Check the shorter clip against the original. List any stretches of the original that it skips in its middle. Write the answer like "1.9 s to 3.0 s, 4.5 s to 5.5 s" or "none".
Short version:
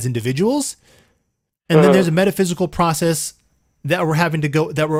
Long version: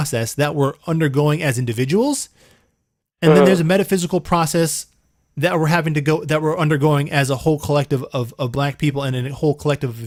none

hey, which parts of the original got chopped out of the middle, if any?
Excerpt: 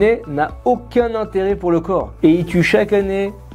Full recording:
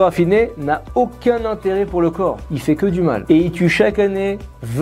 2.4 s to 3.2 s

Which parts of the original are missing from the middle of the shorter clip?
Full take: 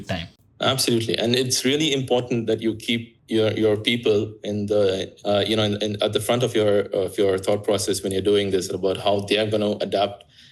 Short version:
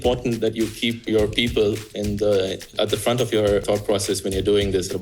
3.1 s to 3.5 s, 5.1 s to 5.9 s, 6.9 s to 7.4 s

